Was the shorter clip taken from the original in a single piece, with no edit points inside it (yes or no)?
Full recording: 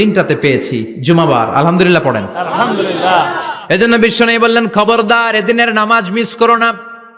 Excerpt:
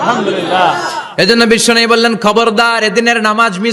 yes